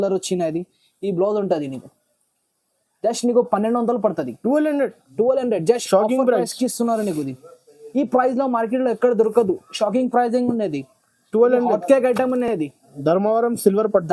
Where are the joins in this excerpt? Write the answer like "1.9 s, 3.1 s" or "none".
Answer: none